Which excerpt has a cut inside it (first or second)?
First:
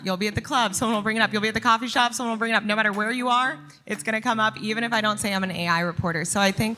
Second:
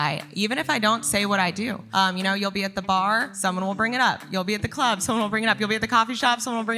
second